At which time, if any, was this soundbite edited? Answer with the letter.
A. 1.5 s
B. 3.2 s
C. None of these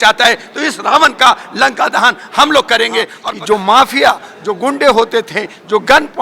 B